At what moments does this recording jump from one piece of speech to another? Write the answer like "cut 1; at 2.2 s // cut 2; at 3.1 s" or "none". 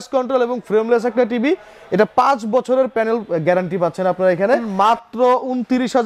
cut 1; at 4.7 s